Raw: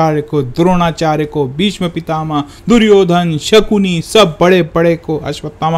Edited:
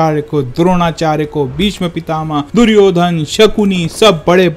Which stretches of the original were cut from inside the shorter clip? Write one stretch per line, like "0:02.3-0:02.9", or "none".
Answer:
0:02.5-0:02.6